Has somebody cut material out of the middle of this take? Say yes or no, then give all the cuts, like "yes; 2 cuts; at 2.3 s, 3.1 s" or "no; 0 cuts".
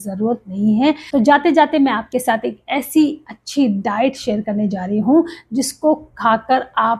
yes; 1 cut; at 1.0 s